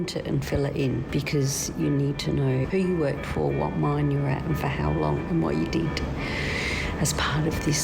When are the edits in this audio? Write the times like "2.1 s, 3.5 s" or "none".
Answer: 1.1 s, 2.6 s